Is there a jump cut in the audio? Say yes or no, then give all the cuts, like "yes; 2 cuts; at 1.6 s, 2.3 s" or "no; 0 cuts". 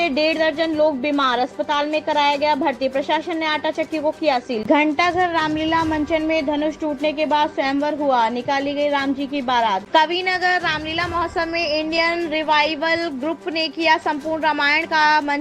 yes; 2 cuts; at 4.6 s, 9.8 s